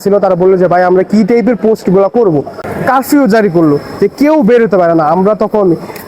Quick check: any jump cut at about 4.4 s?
no; 1 cut; at 2.6 s

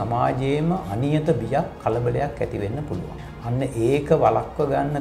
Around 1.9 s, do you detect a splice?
no; 1 cut; at 3.2 s

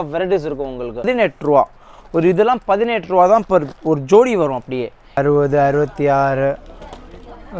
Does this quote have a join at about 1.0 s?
yes; 2 cuts; at 1.0 s, 5.0 s

